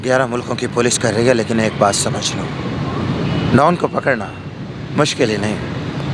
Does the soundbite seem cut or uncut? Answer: uncut